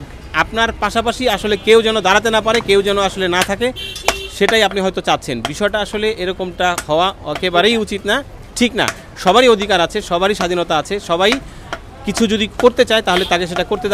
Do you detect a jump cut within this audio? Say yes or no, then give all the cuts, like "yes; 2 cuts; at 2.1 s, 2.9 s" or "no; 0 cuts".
no; 0 cuts